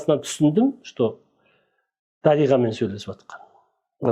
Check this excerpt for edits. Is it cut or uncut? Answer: uncut